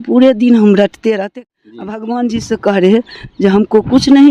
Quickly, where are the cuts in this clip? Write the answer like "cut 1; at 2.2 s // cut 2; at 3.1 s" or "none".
cut 1; at 1.4 s